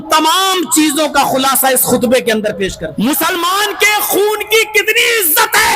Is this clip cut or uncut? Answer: cut